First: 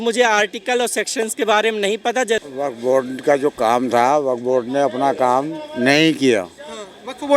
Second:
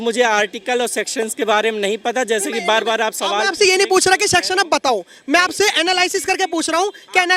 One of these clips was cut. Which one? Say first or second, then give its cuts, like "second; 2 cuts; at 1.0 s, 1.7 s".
first; 1 cut; at 2.4 s